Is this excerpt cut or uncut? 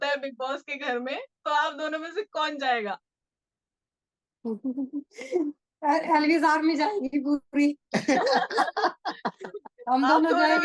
uncut